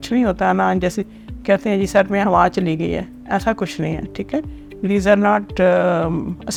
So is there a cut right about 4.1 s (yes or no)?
no